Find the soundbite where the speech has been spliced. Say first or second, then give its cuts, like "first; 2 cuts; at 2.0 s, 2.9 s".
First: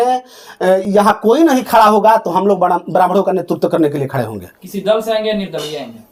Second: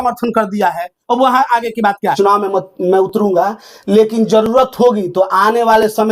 second; 1 cut; at 2.1 s